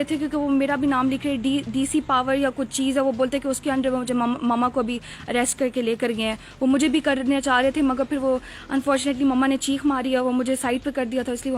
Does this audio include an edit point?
no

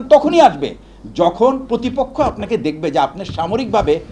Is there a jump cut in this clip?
no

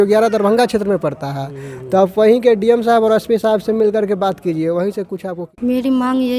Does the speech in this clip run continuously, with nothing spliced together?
no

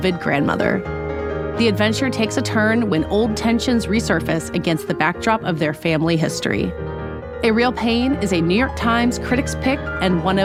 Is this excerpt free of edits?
yes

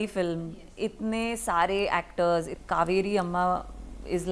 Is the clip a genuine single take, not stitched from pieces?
no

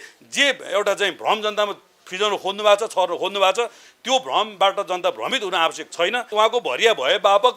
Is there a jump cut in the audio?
yes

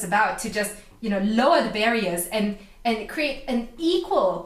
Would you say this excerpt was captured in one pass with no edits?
yes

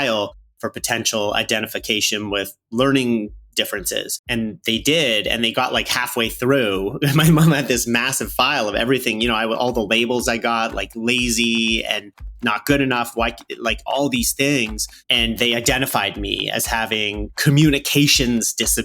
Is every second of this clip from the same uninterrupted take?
no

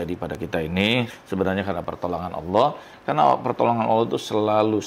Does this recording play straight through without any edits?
no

